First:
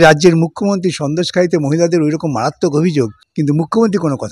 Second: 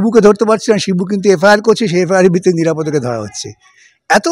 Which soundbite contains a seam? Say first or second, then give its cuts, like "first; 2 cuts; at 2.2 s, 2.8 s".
first; 1 cut; at 3.2 s